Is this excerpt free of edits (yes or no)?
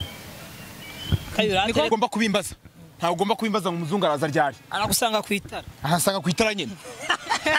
no